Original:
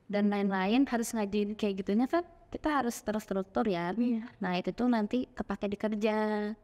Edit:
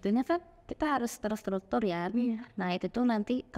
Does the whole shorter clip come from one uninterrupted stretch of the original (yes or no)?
yes